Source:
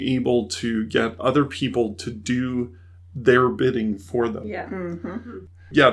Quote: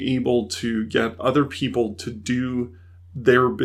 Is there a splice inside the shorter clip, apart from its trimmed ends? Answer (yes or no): no